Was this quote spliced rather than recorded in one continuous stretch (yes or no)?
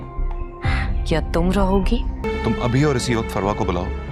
yes